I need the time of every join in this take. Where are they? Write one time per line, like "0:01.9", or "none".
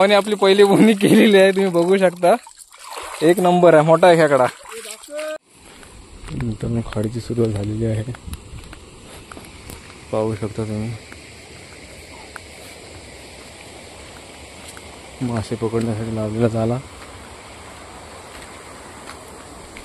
0:05.4

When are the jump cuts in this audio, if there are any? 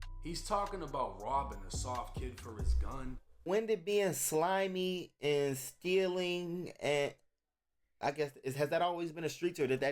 0:03.4

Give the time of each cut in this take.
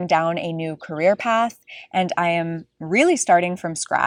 none

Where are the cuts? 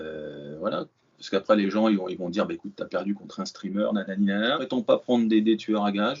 0:04.6

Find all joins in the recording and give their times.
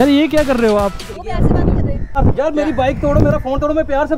0:01.1
0:02.1

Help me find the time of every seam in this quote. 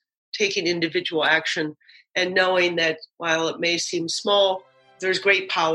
0:04.8

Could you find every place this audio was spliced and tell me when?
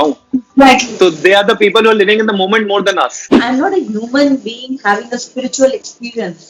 0:03.2

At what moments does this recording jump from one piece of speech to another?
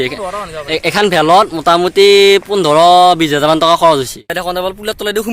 0:04.3

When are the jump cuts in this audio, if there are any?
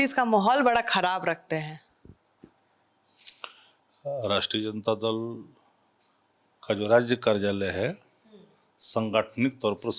none

